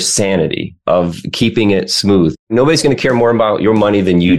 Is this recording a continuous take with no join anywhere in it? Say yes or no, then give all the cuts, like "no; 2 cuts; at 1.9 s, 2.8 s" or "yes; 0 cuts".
no; 1 cut; at 2.4 s